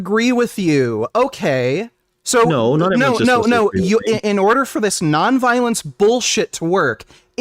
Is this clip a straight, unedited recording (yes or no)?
yes